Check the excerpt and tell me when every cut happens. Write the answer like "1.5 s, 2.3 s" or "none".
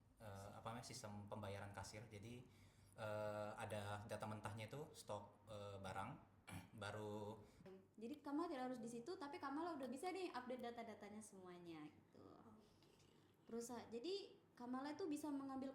7.7 s